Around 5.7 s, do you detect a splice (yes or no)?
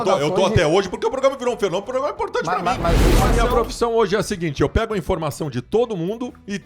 no